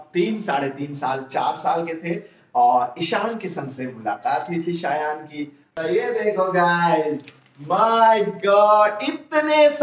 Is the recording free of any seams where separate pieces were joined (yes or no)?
no